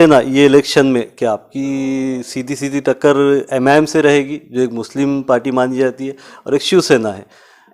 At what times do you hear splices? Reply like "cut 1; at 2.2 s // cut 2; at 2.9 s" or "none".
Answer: none